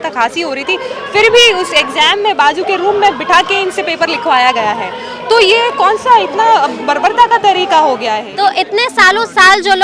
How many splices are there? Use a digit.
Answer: 1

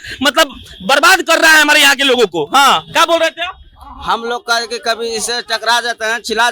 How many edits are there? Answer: 0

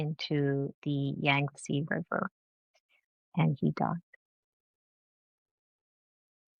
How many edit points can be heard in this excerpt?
0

